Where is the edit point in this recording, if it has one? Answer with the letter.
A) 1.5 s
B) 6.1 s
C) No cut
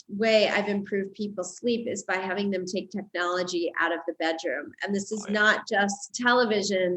B